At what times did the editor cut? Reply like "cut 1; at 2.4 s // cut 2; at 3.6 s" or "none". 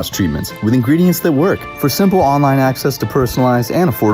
cut 1; at 1.7 s